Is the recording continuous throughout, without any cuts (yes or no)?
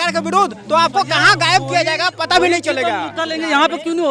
yes